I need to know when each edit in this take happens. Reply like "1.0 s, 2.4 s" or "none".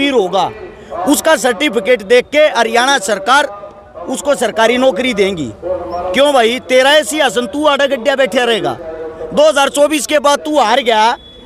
none